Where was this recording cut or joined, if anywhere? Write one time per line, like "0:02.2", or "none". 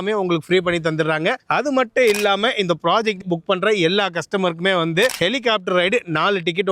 0:03.2